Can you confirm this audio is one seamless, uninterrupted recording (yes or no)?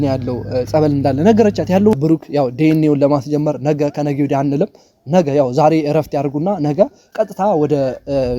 no